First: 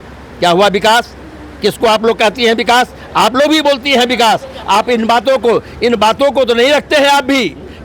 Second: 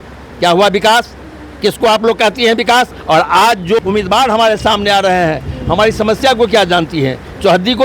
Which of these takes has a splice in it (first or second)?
second